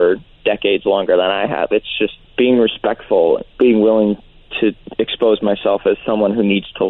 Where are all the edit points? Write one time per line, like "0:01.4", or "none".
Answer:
0:02.2
0:03.5
0:04.8